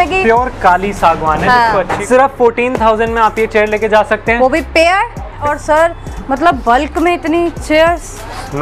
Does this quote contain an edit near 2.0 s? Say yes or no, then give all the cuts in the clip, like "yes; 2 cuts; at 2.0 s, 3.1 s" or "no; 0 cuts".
yes; 2 cuts; at 2.0 s, 5.4 s